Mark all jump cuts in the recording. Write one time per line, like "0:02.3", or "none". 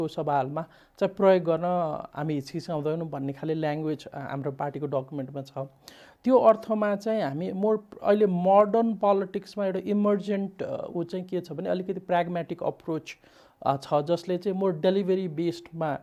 none